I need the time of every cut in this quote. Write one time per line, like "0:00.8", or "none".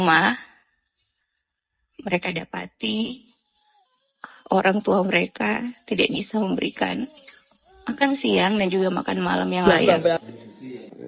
0:09.6